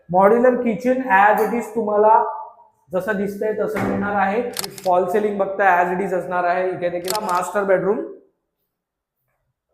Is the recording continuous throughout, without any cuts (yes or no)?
no